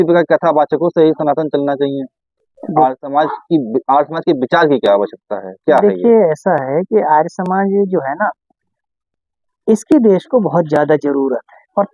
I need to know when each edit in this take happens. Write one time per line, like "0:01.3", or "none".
none